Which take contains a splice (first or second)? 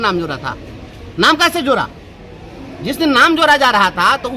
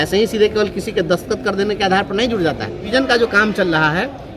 second